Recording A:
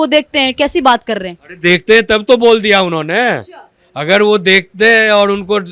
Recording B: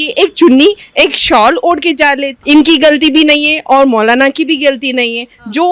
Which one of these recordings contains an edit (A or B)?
B